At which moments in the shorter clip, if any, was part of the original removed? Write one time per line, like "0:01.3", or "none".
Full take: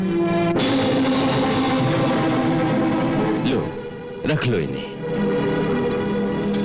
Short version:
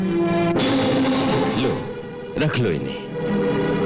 0:01.5

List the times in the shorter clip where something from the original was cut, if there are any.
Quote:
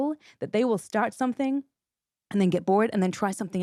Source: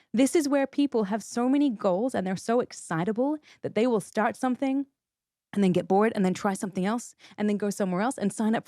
none

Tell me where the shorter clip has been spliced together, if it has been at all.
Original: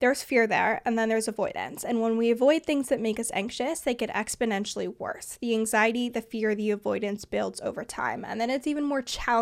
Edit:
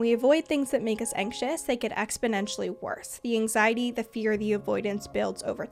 none

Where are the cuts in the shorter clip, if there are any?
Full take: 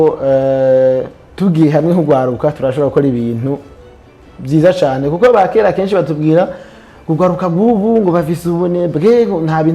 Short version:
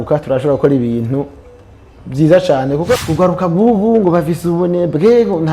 0:02.9

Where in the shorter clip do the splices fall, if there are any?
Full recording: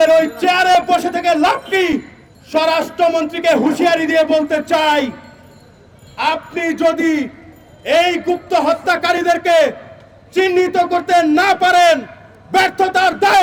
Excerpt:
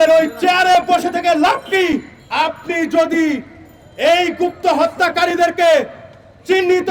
0:02.2

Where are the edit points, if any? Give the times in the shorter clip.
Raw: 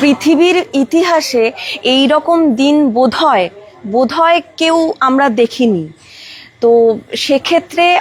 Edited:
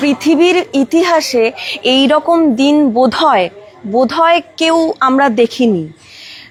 none

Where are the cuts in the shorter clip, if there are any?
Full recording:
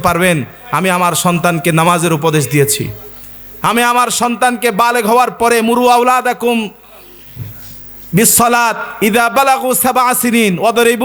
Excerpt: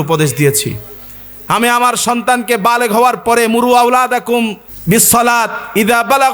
0:04.7

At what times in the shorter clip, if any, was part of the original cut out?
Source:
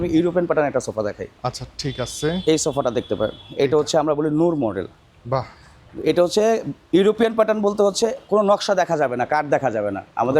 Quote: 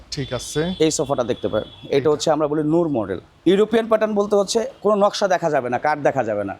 0:03.3

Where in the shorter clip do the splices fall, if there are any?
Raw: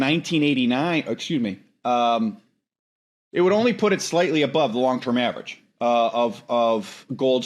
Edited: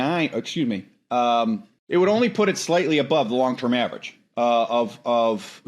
0:01.7

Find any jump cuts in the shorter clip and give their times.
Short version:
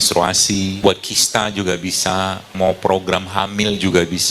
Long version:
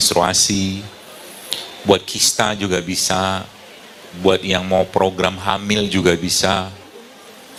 0:00.8
0:02.5

